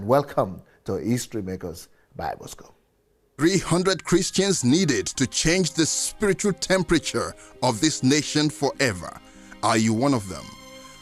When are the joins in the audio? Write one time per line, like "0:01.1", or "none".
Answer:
0:03.4